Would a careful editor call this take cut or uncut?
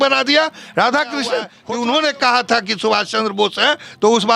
cut